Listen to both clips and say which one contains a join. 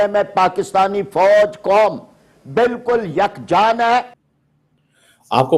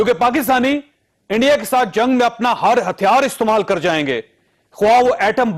first; 1 cut; at 4.3 s

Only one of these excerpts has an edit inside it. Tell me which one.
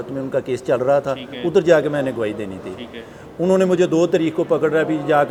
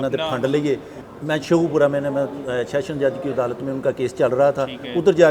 second; 1 cut; at 0.9 s

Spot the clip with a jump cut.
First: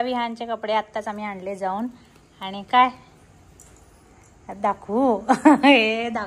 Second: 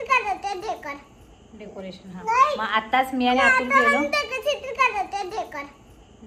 second; 1 cut; at 2.1 s

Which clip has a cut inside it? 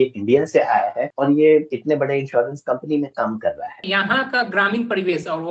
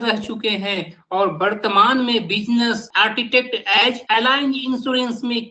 first; 3 cuts; at 1.1 s, 1.7 s, 3.9 s

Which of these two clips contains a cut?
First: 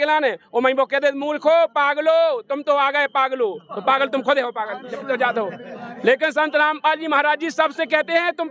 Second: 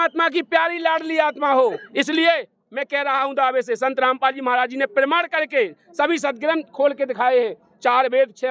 second; 1 cut; at 1.8 s

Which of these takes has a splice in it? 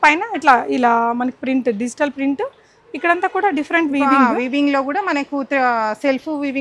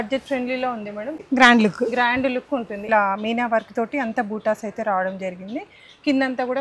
second; 2 cuts; at 1.2 s, 2.8 s

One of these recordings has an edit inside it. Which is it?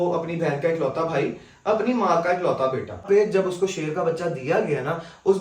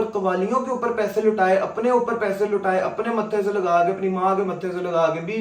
first; 1 cut; at 3.0 s

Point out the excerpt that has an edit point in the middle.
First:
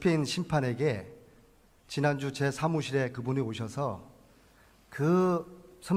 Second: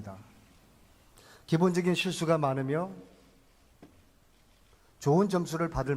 second; 1 cut; at 3.1 s

